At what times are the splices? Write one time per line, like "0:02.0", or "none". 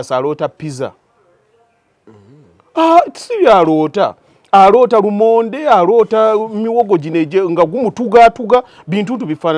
none

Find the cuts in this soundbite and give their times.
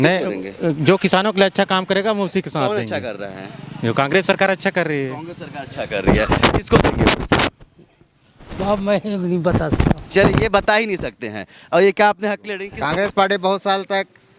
none

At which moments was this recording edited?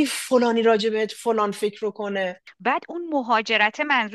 0:02.5

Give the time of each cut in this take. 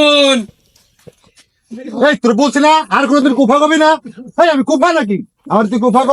none

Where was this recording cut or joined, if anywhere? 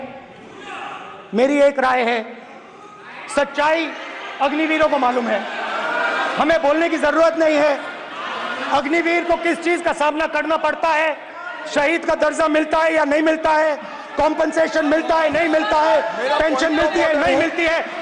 none

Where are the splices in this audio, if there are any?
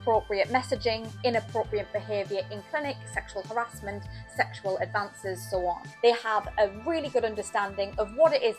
0:05.9

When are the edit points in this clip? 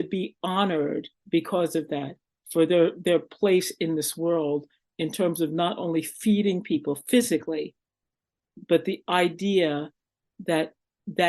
0:01.1
0:04.8

